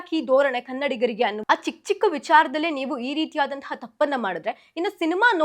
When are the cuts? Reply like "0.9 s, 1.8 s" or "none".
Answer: 1.4 s